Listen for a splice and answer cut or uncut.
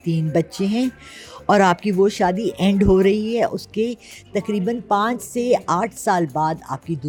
uncut